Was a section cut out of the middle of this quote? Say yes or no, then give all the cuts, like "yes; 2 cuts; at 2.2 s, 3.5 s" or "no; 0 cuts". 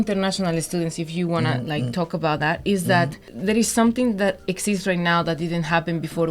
yes; 1 cut; at 3.3 s